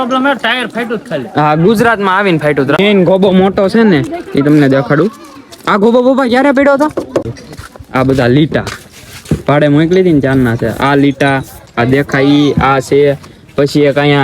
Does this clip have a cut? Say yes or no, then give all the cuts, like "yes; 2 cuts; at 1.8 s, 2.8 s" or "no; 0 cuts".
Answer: yes; 2 cuts; at 2.8 s, 7.4 s